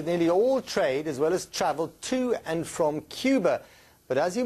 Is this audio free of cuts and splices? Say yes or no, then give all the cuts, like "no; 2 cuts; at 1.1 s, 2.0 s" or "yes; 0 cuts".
yes; 0 cuts